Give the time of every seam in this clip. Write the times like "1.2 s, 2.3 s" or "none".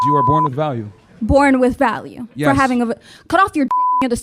none

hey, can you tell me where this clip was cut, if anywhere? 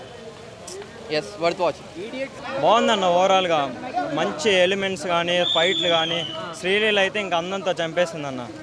2.4 s

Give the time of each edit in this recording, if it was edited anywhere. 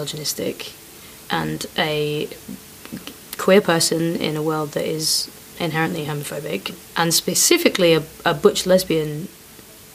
6.8 s

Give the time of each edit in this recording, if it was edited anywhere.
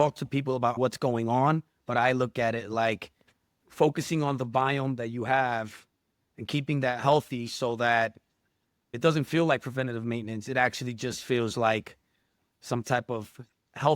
0.8 s, 8.9 s

